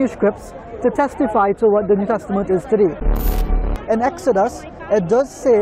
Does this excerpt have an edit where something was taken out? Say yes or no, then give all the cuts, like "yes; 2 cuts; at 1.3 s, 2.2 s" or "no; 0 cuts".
yes; 1 cut; at 3.5 s